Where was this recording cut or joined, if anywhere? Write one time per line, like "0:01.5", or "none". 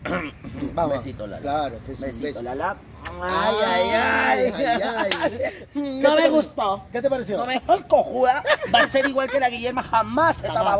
none